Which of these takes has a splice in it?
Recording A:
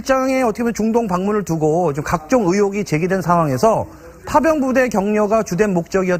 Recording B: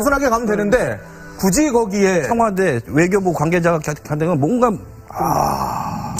A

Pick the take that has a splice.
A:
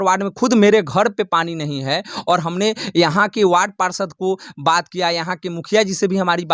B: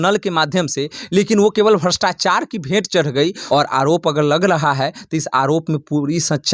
B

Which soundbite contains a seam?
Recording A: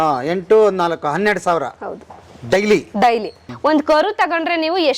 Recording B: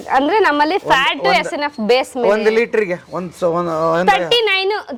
A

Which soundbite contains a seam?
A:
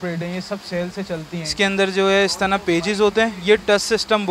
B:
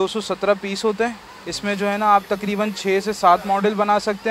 A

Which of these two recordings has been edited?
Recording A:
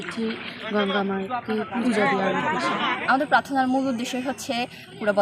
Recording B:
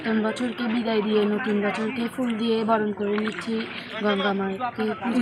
A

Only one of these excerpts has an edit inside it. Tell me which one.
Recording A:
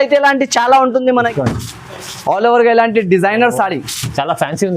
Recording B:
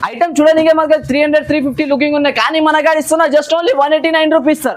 A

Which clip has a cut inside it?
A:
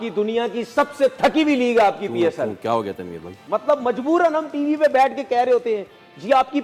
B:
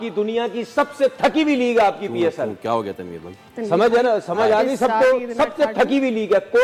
A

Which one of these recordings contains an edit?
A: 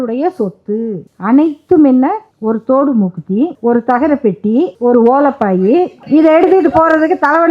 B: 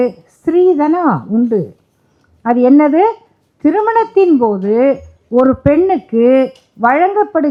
A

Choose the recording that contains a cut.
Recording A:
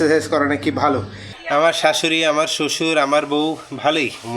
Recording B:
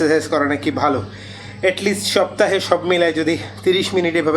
A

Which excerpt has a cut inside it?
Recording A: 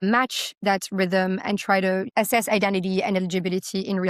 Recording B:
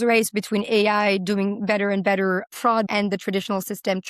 B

